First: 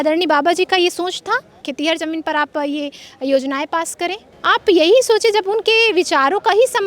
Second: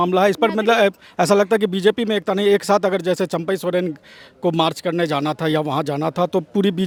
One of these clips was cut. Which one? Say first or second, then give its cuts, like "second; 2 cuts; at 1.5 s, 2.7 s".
first; 2 cuts; at 1.7 s, 4.3 s